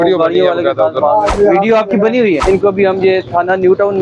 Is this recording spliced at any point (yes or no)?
yes